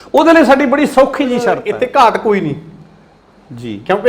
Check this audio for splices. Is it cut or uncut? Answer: cut